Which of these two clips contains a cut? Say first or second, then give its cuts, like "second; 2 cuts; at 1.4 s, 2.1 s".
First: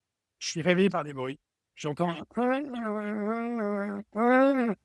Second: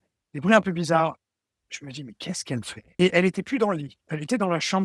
second; 1 cut; at 2.8 s